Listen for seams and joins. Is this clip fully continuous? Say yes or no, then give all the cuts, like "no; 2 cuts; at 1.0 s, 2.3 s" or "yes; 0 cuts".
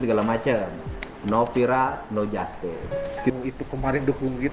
no; 1 cut; at 3.3 s